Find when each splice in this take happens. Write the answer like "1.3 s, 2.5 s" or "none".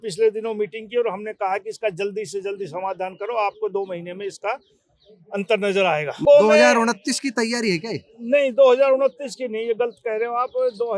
6.2 s